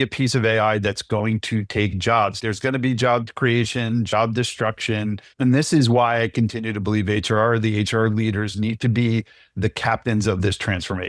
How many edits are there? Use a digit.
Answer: 3